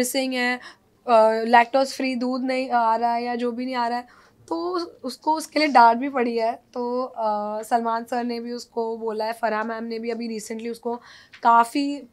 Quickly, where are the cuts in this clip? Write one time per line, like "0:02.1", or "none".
none